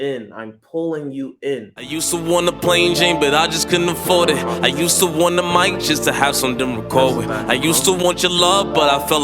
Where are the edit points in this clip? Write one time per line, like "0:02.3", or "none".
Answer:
0:01.8